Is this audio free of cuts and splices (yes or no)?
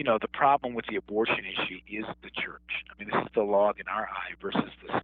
no